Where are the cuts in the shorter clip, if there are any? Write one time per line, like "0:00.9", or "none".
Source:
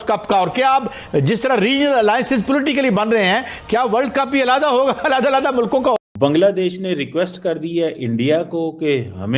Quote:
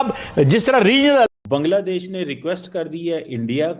0:01.3